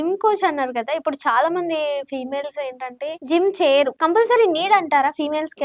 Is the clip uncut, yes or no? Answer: no